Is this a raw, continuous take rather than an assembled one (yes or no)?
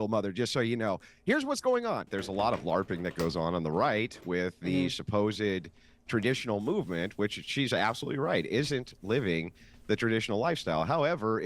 no